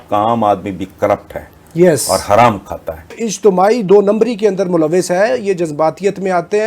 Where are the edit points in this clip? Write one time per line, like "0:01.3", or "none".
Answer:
0:03.3

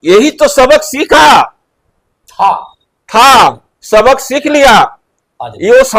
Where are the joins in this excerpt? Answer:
none

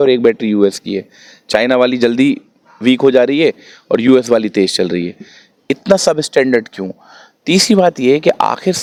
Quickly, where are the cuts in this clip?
none

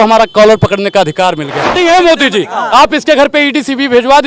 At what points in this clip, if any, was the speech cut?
0:01.8

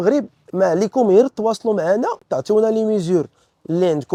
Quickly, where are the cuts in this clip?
none

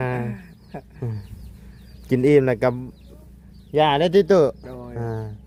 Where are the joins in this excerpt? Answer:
none

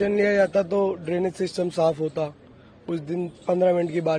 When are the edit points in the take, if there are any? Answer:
none

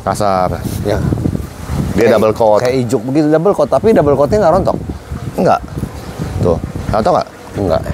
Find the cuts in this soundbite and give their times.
none

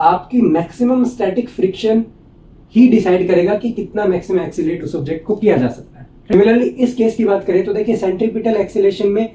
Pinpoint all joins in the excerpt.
0:06.3

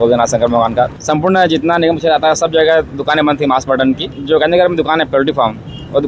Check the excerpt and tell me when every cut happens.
0:00.9
0:04.1

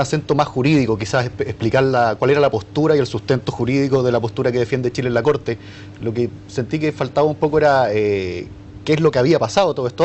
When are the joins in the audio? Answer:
0:08.5

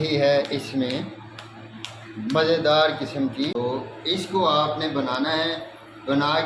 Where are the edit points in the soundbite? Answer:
0:03.5

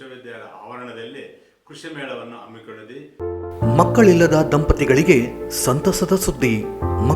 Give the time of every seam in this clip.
0:03.1

